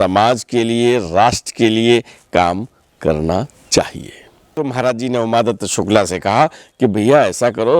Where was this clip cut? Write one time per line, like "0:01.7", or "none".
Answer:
0:04.6